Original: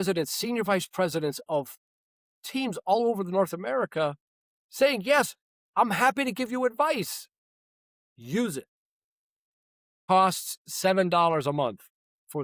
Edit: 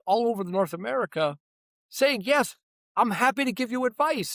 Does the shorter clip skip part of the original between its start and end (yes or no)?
no